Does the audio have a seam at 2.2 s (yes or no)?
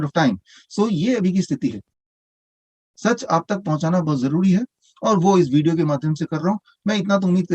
yes